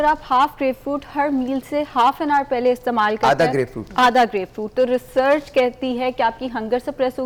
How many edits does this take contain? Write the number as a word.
zero